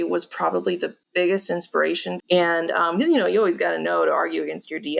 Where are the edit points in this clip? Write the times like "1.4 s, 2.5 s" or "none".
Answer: 1.0 s, 2.1 s